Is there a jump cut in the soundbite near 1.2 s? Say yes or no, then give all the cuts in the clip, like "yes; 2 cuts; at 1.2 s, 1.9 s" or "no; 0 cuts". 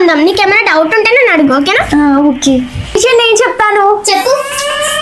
no; 1 cut; at 2.9 s